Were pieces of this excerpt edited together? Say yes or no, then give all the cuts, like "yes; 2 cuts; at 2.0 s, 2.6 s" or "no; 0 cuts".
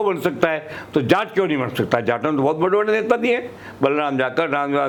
no; 0 cuts